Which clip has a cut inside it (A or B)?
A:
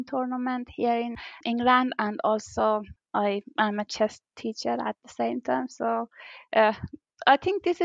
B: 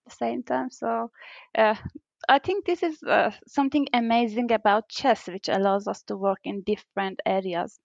A